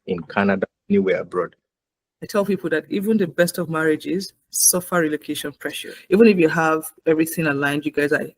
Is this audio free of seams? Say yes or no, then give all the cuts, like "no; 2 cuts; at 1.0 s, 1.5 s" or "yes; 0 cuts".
no; 2 cuts; at 1.6 s, 5.9 s